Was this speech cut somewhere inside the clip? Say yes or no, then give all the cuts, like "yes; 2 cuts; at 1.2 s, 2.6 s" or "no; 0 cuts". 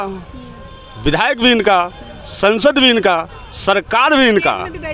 no; 0 cuts